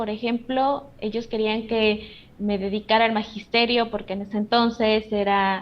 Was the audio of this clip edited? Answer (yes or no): no